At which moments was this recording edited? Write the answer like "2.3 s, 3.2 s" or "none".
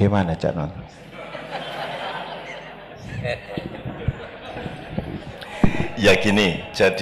none